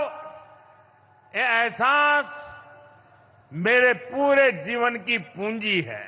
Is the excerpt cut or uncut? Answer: uncut